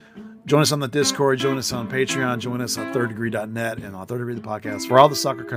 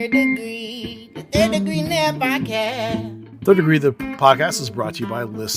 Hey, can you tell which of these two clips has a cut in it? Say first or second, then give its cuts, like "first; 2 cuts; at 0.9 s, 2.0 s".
second; 1 cut; at 3.3 s